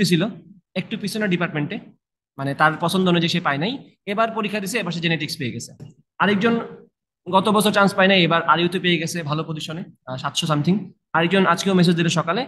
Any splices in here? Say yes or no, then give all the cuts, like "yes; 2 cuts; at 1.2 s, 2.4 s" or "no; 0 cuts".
yes; 1 cut; at 5.8 s